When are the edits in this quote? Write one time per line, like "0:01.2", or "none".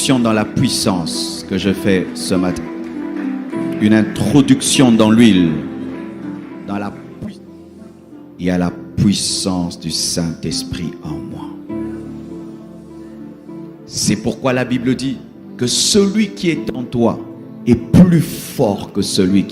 0:07.0